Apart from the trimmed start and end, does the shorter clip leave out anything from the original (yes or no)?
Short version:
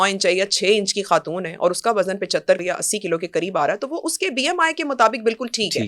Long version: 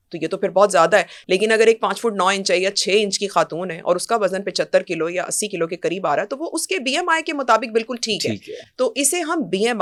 yes